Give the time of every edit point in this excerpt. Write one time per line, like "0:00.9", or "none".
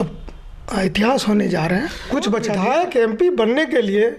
0:02.5